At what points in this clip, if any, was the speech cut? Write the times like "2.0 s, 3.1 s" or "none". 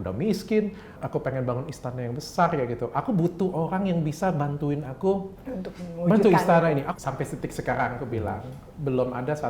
0.9 s, 6.8 s